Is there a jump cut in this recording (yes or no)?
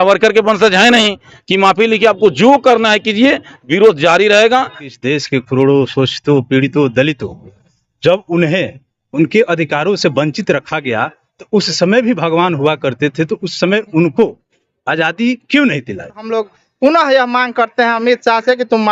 yes